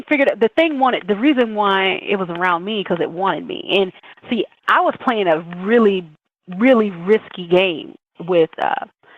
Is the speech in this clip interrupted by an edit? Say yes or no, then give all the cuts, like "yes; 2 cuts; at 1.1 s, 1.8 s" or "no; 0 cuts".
no; 0 cuts